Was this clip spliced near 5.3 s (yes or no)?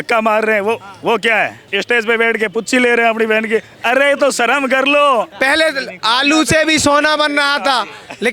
yes